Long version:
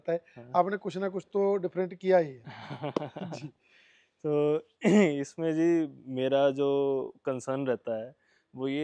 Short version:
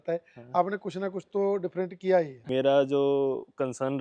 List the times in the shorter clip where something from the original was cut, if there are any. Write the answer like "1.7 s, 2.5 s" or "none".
2.4 s